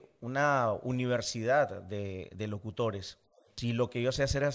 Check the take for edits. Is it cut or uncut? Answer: cut